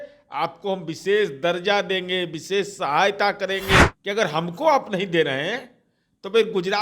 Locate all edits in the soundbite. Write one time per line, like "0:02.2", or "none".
0:03.8